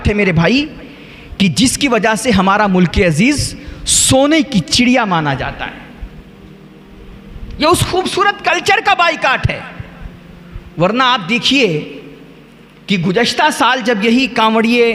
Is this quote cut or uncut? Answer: uncut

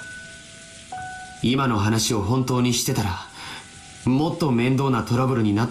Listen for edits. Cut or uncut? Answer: uncut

